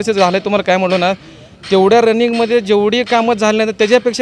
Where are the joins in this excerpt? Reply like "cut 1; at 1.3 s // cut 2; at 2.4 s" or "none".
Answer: none